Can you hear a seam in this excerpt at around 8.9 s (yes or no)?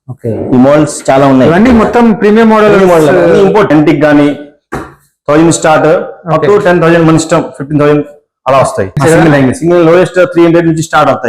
yes